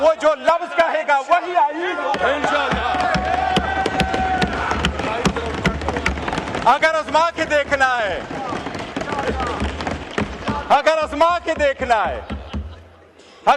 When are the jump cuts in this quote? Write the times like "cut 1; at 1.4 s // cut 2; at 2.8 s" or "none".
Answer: none